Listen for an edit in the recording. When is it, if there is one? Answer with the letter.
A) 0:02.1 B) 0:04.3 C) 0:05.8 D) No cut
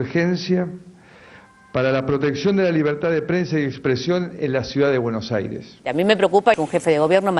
C